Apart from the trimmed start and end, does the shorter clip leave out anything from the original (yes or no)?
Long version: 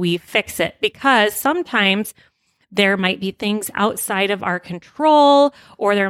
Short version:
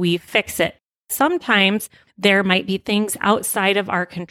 yes